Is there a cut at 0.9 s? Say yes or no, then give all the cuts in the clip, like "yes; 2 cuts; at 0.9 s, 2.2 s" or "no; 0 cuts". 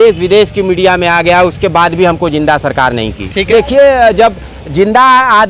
no; 1 cut; at 3.5 s